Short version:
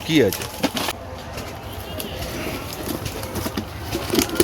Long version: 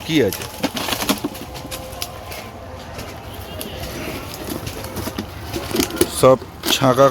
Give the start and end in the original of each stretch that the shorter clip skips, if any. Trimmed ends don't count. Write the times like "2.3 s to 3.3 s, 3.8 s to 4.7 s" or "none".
0.9 s to 2.5 s